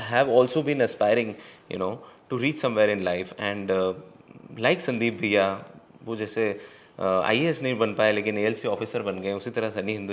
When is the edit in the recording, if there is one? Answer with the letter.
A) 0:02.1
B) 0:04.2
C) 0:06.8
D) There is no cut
D